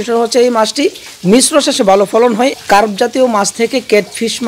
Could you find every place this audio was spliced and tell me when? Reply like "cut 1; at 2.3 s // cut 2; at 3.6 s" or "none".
cut 1; at 2.5 s